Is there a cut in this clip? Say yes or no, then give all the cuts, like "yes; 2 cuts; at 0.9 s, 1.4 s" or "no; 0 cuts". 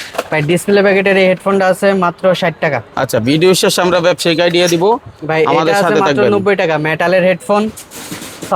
no; 0 cuts